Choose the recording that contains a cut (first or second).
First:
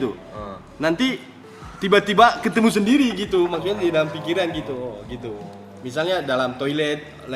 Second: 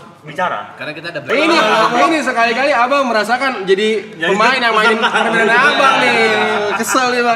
second